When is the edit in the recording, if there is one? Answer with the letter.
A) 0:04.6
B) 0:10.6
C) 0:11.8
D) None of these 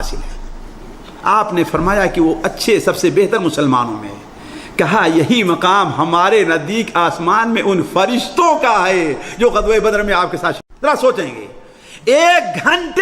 B